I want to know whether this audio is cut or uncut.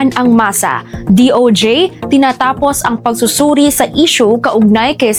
uncut